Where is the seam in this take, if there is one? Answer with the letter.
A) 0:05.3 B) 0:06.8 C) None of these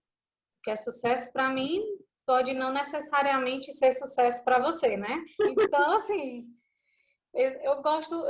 A